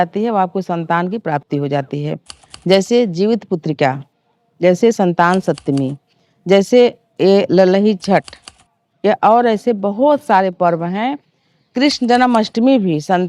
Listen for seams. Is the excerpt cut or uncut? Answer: uncut